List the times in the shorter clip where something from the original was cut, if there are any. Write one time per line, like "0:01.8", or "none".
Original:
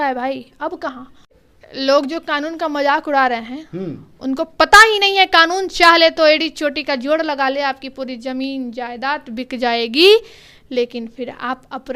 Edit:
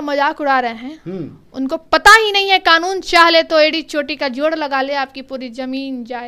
none

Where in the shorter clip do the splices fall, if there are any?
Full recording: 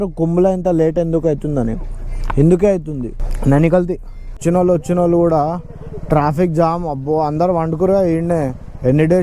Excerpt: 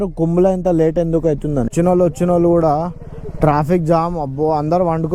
0:01.7

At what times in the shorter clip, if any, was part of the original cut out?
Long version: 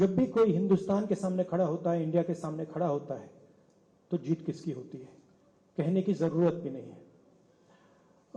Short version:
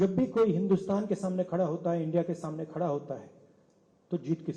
none

